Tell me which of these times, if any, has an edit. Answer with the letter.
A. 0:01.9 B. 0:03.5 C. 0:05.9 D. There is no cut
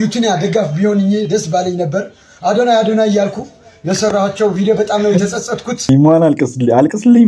C